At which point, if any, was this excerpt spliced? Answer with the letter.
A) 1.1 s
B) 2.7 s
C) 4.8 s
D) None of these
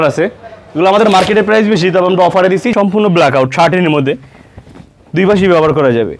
B